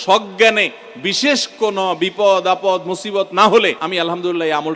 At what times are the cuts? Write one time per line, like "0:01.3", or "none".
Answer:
0:03.8